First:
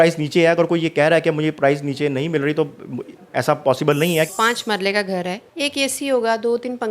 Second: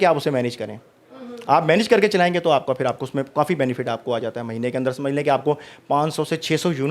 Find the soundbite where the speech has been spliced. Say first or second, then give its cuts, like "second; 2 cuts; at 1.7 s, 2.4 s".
first; 2 cuts; at 4.3 s, 5.4 s